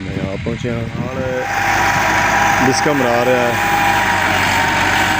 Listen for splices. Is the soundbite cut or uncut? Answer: cut